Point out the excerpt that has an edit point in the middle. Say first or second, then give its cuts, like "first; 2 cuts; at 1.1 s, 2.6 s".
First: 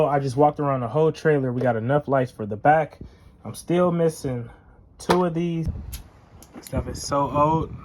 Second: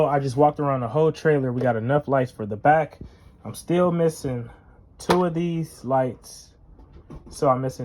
first; 1 cut; at 5.7 s